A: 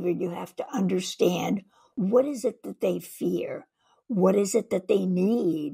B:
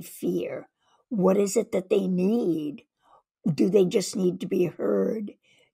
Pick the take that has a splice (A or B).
A